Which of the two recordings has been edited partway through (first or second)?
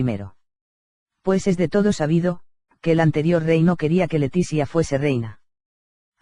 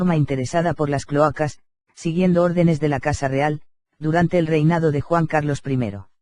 first